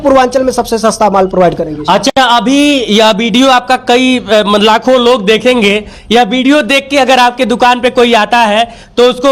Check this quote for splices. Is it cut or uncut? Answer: uncut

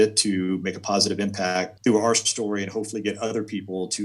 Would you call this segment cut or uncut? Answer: cut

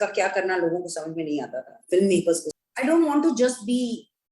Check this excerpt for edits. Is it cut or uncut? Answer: cut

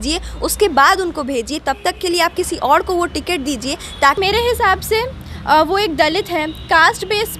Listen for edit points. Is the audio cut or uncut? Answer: cut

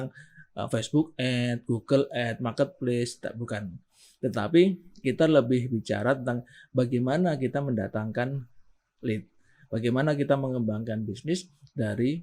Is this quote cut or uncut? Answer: uncut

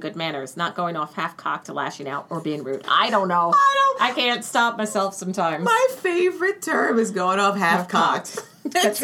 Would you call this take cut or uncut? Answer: uncut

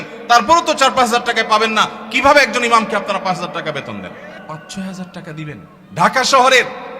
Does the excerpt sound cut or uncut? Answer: cut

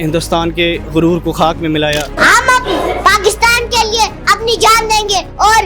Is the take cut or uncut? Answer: cut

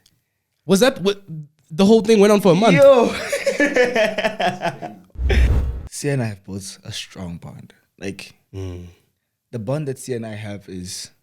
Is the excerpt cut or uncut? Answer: cut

